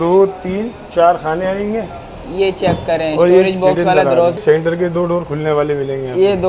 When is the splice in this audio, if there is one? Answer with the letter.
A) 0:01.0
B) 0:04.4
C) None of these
B